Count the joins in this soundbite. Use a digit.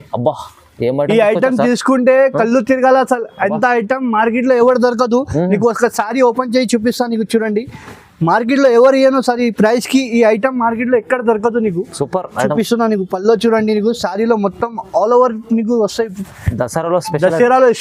0